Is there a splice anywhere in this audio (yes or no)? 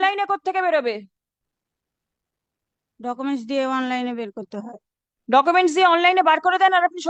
no